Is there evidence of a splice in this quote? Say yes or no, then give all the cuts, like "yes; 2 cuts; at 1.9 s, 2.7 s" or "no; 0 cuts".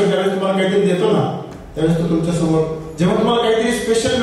no; 0 cuts